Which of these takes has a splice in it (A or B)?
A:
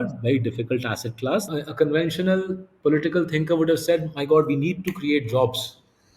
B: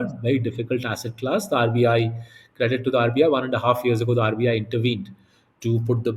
A